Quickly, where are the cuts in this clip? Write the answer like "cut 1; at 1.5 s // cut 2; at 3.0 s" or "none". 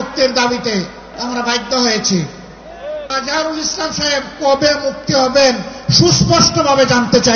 cut 1; at 1.1 s // cut 2; at 3.1 s